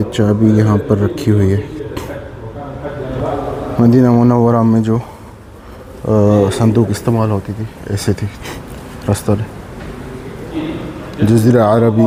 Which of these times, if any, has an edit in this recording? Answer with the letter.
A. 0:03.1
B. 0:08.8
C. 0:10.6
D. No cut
D